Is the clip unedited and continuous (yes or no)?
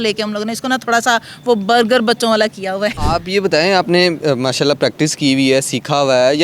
no